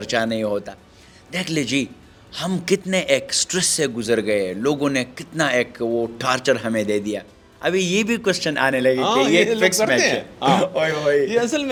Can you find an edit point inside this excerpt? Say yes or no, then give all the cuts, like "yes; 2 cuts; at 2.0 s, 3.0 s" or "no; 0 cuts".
no; 0 cuts